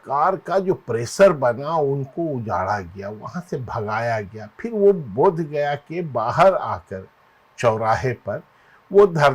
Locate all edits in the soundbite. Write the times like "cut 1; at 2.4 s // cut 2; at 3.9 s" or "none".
none